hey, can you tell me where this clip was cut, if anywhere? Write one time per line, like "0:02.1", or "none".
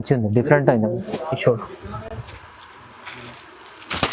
none